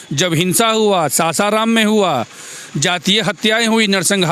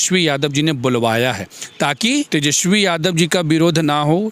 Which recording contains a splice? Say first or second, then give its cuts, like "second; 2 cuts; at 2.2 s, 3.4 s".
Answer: second; 1 cut; at 2.3 s